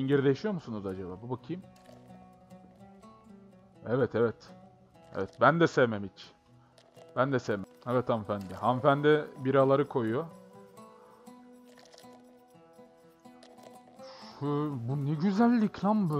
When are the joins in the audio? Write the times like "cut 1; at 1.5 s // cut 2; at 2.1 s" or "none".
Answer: cut 1; at 7.7 s